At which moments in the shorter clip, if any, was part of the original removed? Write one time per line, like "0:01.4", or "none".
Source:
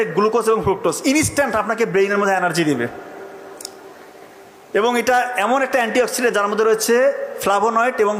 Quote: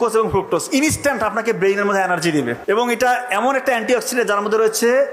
0:02.6